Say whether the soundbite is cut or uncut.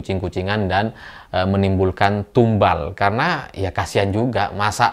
uncut